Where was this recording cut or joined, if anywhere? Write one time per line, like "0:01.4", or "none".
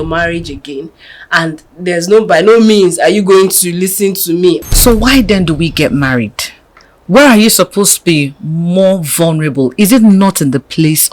0:04.7